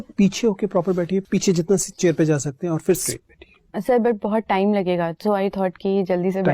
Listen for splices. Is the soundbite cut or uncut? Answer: cut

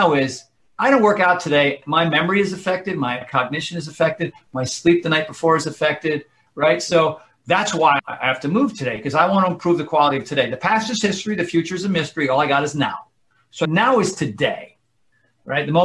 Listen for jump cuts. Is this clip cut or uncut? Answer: cut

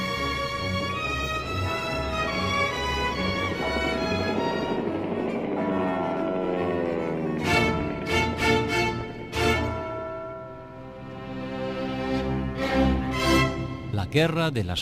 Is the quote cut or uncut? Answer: cut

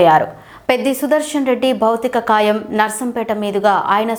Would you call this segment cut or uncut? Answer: uncut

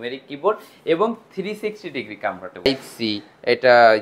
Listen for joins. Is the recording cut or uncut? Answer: cut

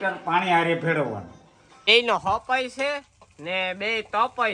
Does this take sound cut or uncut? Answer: cut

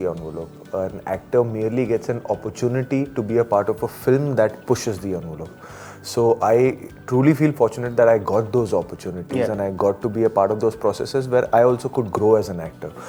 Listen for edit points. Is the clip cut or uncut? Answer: uncut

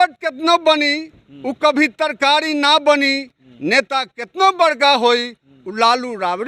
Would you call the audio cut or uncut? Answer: uncut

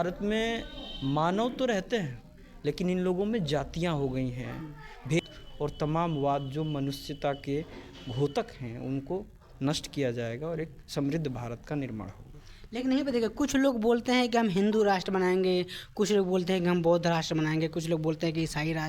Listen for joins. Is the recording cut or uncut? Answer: cut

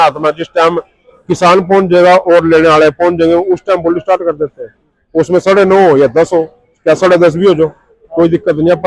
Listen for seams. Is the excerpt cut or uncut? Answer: uncut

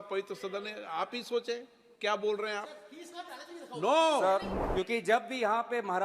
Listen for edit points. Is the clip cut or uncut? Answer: cut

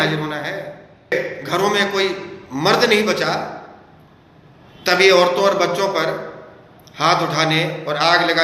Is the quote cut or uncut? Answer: cut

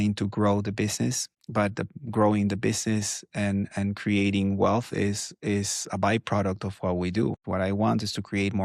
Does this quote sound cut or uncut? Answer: cut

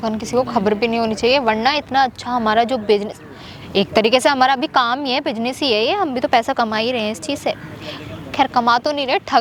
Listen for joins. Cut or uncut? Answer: uncut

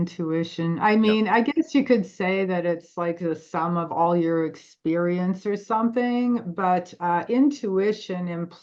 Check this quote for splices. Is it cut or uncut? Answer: uncut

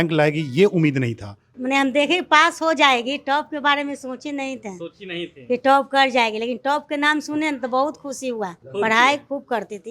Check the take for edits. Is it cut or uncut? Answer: cut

